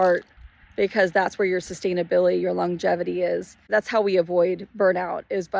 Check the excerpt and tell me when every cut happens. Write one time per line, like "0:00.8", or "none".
0:03.6